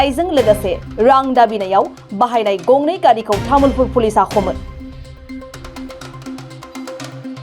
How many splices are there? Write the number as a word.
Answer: one